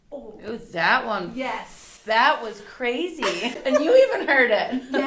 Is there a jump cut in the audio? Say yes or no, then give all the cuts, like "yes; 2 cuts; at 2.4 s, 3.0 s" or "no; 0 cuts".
yes; 1 cut; at 3.6 s